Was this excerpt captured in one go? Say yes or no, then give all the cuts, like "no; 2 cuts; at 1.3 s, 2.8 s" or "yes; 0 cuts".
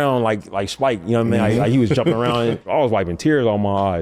no; 1 cut; at 2.6 s